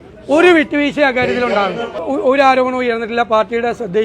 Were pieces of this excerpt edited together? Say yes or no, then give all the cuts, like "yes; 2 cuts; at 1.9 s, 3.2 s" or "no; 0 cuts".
yes; 1 cut; at 2.0 s